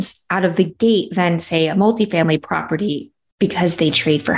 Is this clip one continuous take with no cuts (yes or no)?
yes